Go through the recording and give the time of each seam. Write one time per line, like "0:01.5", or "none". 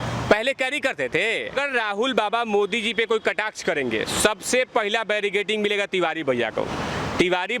0:01.5